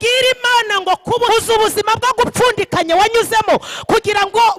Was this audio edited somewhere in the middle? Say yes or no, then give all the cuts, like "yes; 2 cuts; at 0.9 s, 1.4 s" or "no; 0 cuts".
yes; 1 cut; at 1.3 s